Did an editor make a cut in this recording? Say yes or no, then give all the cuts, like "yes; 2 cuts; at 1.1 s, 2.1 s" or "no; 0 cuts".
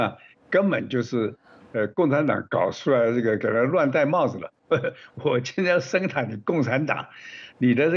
yes; 1 cut; at 4.6 s